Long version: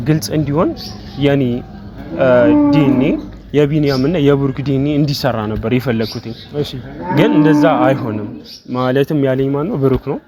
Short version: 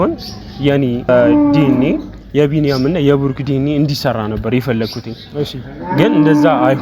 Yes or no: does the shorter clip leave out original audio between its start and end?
yes